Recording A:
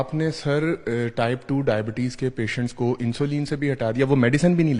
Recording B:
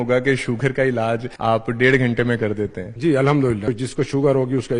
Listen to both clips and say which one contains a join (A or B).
B